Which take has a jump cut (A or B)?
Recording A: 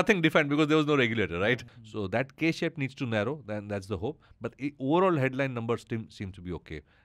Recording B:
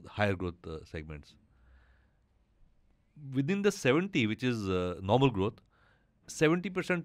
A